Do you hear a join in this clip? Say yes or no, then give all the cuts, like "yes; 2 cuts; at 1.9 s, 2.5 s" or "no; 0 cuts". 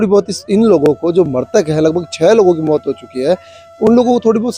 no; 0 cuts